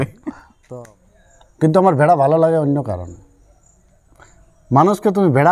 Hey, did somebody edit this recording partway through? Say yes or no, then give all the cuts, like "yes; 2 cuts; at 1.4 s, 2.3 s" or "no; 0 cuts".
yes; 1 cut; at 1.0 s